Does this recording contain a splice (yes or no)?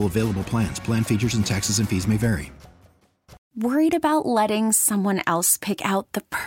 yes